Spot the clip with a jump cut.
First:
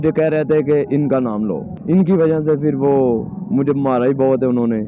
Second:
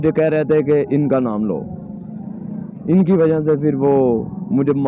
first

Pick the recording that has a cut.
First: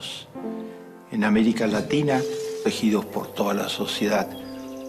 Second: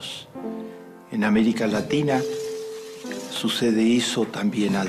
second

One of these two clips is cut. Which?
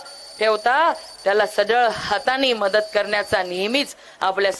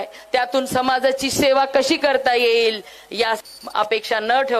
second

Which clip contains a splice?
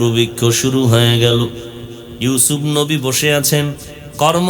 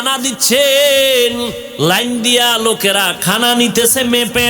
second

